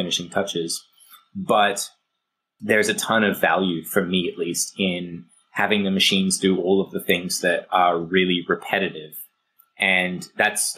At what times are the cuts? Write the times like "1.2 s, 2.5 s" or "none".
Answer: 9.3 s